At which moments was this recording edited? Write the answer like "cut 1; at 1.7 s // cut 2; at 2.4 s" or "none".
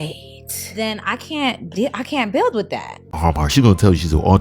cut 1; at 3.1 s